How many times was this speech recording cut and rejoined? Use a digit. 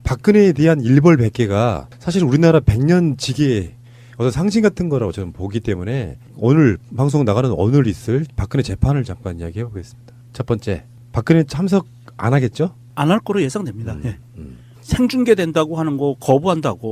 0